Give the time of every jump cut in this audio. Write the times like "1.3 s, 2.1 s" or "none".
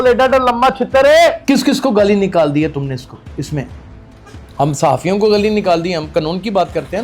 1.4 s